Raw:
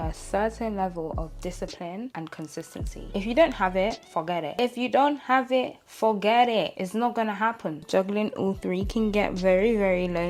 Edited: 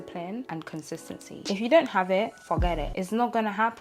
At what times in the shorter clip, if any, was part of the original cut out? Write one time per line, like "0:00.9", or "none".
0:02.9